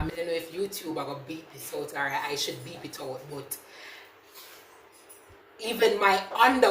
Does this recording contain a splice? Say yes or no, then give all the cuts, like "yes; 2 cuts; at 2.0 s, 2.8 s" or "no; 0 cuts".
no; 0 cuts